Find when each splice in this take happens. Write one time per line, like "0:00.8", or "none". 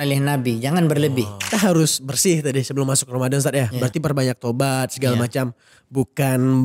0:01.5